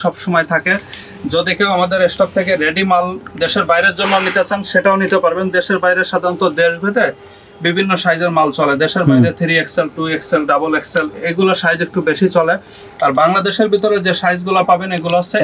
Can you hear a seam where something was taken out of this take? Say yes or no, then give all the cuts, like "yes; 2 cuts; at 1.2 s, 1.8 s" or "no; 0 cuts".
no; 0 cuts